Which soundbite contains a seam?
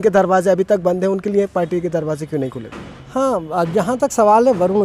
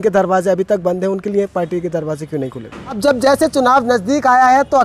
second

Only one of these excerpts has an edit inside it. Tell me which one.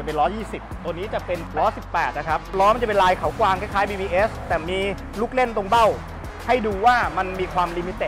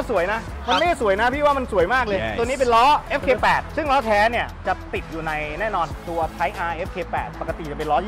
first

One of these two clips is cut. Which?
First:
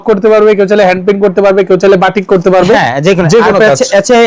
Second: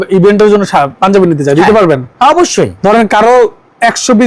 second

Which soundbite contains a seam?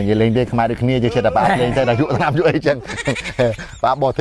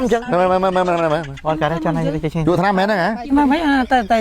second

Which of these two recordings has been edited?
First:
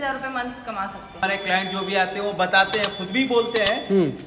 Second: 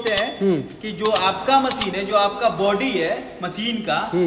first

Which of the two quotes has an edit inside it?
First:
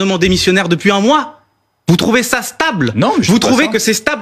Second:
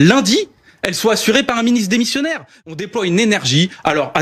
second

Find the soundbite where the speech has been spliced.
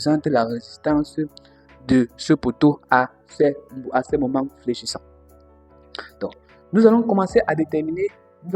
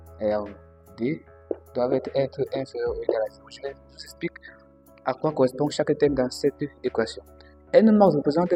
first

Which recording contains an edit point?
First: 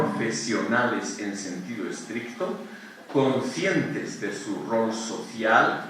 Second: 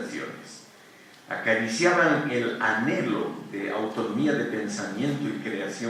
first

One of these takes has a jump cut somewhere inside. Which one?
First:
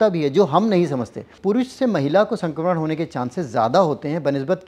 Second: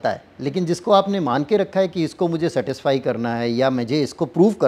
first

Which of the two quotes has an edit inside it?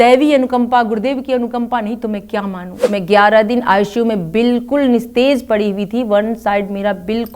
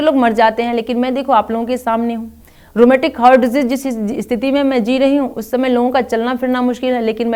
first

